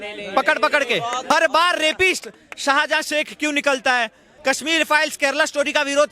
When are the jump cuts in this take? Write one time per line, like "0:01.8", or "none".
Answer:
0:01.2
0:04.3